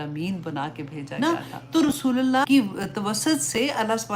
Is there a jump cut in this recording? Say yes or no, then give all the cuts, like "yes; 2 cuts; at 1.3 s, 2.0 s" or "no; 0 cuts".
yes; 2 cuts; at 1.1 s, 2.4 s